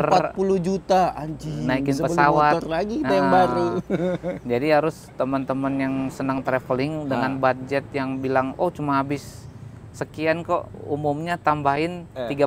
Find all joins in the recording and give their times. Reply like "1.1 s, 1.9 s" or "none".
none

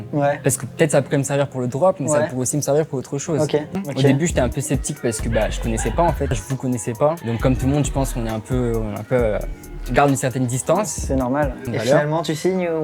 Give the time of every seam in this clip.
3.8 s, 6.4 s, 11.6 s

